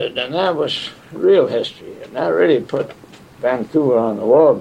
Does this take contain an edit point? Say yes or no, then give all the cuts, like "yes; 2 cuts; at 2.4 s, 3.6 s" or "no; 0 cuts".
no; 0 cuts